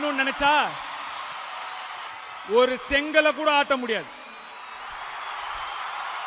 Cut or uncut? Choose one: cut